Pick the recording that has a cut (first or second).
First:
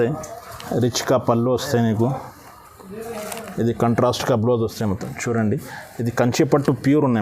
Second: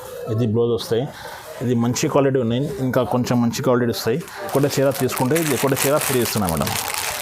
second